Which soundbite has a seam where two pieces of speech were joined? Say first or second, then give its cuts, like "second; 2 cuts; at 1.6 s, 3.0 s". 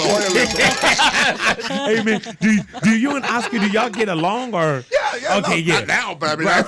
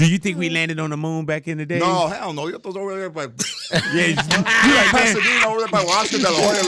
first; 1 cut; at 1.7 s